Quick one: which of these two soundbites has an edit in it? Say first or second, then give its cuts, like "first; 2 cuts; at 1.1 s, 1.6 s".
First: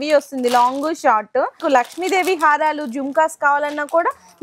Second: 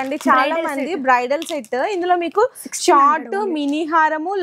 first; 1 cut; at 1.6 s